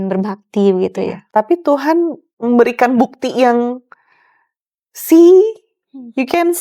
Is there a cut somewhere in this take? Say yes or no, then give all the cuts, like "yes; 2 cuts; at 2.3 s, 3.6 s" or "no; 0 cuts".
yes; 1 cut; at 1.2 s